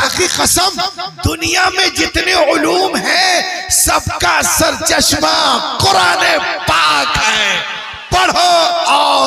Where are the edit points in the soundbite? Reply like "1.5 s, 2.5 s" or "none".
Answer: none